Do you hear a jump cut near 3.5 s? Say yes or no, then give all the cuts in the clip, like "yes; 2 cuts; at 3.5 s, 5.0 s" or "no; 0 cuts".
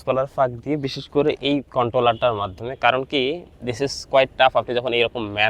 yes; 1 cut; at 3.5 s